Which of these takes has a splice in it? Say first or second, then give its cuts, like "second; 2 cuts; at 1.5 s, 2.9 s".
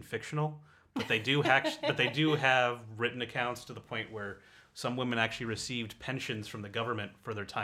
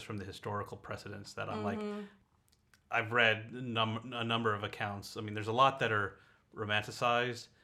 second; 1 cut; at 2.2 s